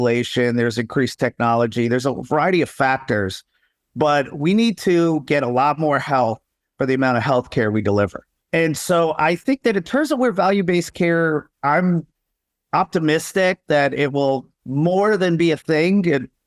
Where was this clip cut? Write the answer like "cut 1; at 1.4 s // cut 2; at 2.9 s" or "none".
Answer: none